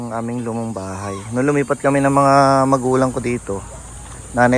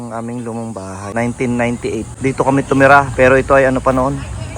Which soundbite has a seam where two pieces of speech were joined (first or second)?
second